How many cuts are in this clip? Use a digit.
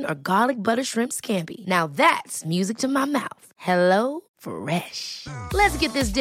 0